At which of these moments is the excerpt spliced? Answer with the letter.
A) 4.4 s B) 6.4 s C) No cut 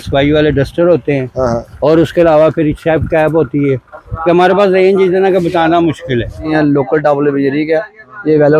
B